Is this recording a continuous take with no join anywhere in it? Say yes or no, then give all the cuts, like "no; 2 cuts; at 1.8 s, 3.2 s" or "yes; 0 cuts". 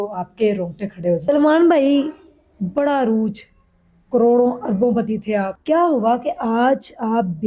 no; 2 cuts; at 1.2 s, 5.5 s